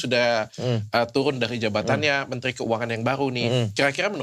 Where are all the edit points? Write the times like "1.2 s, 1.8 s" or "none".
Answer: none